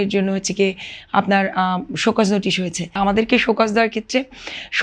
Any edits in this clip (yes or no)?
yes